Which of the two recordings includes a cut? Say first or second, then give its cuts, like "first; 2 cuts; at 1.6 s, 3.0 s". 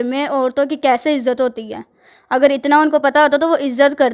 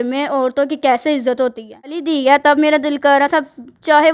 second; 1 cut; at 2.0 s